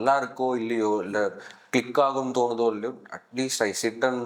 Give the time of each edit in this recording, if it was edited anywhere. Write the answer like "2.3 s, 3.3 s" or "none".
none